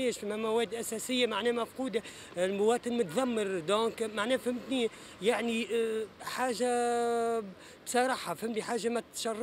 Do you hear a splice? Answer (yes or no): no